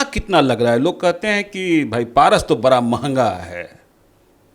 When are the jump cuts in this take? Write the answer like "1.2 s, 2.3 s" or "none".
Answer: none